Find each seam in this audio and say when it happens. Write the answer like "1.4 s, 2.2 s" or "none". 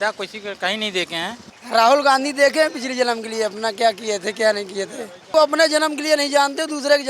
1.5 s, 5.3 s